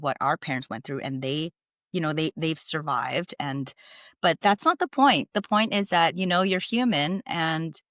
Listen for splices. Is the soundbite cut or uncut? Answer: uncut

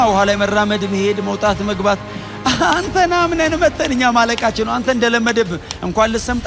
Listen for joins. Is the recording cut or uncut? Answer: uncut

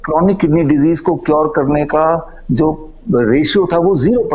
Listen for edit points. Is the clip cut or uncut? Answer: uncut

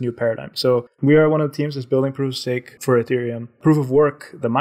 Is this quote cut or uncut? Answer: cut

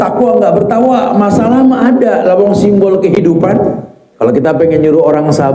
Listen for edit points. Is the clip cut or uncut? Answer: cut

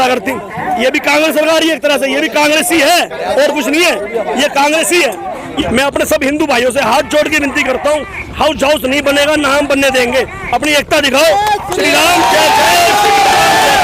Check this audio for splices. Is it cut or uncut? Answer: cut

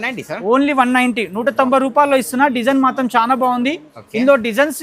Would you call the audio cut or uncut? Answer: uncut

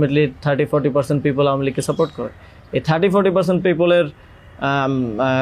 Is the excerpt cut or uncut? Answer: uncut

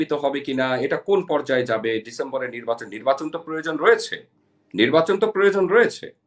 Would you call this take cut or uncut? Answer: uncut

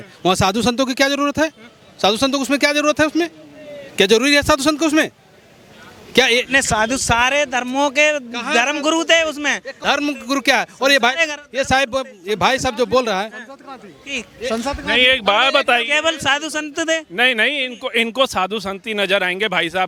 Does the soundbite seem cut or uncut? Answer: uncut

